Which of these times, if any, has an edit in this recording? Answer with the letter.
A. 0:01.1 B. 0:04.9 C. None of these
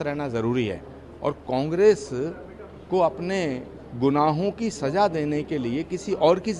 C